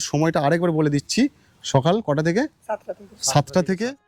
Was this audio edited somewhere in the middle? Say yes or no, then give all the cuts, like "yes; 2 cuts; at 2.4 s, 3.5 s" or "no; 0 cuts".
no; 0 cuts